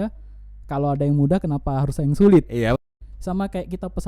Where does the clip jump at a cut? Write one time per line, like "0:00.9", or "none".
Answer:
0:02.7